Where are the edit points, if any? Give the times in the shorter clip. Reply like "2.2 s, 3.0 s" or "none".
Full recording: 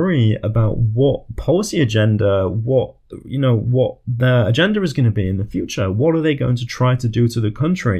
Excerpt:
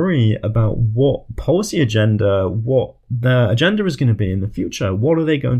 3.1 s